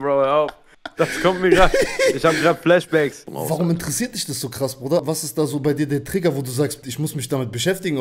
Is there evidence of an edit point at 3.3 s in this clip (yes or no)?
yes